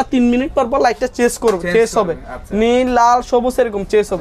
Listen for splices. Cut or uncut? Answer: uncut